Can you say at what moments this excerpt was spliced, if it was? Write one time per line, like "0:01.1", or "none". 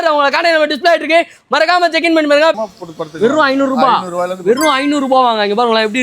0:02.6